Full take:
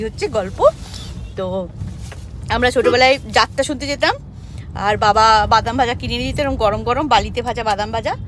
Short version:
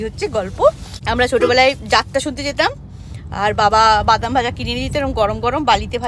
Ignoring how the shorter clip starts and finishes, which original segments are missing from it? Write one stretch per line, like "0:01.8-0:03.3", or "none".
0:00.9-0:02.3